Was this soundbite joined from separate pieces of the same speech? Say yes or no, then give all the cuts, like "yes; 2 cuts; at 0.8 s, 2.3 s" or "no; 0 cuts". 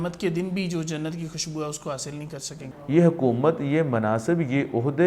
yes; 1 cut; at 2.4 s